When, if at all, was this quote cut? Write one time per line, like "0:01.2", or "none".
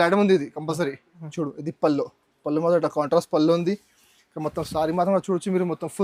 0:01.2